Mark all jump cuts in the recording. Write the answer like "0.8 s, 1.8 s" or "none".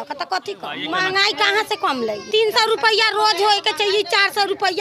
0.8 s, 2.2 s